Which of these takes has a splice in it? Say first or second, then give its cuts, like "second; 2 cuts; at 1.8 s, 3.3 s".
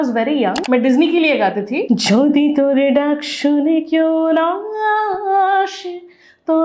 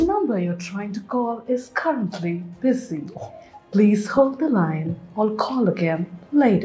first; 1 cut; at 1.8 s